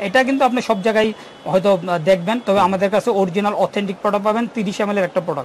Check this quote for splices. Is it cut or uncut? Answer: uncut